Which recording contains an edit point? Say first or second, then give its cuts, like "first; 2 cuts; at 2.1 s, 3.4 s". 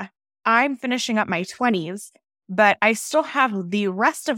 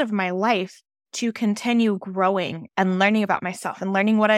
second; 1 cut; at 2.6 s